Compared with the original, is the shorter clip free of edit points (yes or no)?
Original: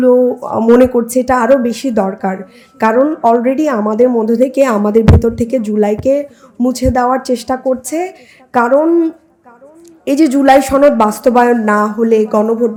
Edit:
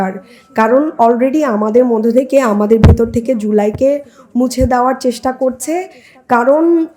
yes